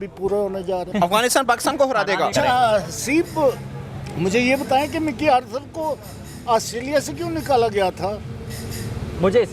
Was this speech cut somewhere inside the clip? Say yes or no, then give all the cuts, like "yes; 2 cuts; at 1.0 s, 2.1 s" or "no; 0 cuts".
yes; 2 cuts; at 0.9 s, 2.3 s